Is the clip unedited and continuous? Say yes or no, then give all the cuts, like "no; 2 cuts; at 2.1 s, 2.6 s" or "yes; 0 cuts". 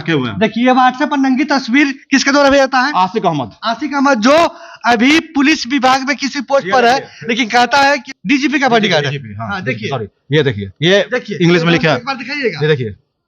no; 1 cut; at 8.0 s